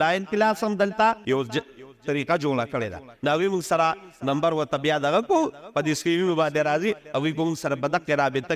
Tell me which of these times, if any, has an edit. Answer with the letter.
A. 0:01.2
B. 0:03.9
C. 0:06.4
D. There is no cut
A